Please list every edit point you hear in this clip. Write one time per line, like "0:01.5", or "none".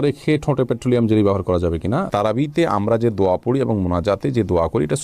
0:02.1